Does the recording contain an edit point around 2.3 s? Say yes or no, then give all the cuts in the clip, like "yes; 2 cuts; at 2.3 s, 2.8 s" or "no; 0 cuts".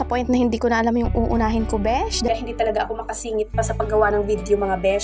yes; 1 cut; at 2.3 s